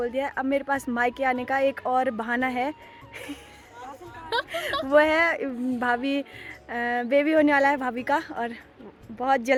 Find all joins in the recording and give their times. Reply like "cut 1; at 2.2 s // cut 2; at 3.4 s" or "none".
none